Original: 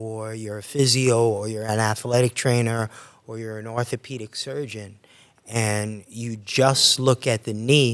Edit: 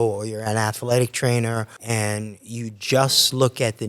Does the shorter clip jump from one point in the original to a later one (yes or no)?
yes